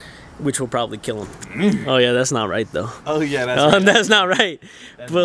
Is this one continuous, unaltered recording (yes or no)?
no